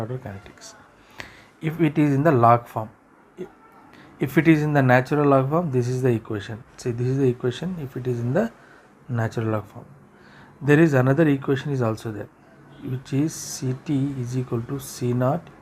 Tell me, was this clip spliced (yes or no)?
no